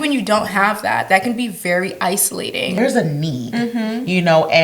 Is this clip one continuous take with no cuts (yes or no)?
no